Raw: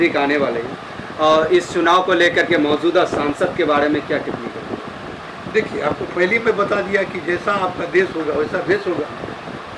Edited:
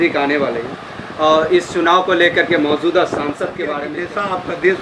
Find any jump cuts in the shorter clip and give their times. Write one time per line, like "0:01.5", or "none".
0:03.8